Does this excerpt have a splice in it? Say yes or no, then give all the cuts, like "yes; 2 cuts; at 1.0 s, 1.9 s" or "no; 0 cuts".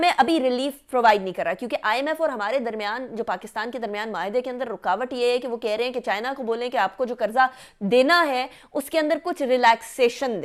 no; 0 cuts